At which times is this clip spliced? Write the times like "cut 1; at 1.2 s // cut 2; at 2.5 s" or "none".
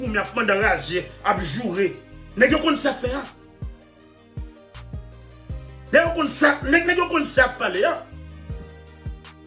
cut 1; at 3.3 s // cut 2; at 5.9 s // cut 3; at 8.1 s